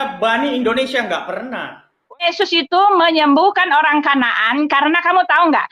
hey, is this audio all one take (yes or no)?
no